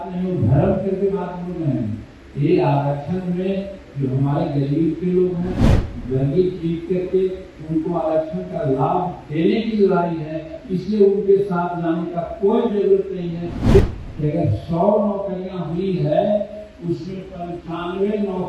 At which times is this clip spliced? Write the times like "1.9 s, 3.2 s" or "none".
13.8 s